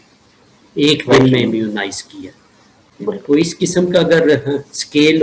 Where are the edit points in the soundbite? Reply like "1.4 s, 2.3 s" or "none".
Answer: none